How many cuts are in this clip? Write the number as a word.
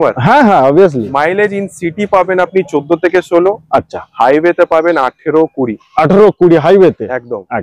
zero